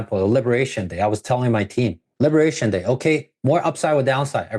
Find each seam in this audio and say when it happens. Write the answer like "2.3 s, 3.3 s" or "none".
2.0 s